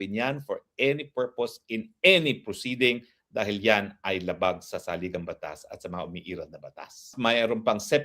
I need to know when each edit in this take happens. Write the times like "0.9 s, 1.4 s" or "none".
7.1 s